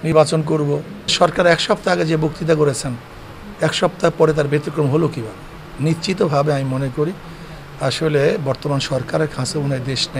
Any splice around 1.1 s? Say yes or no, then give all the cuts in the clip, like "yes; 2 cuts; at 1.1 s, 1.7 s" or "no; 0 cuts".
yes; 1 cut; at 1.1 s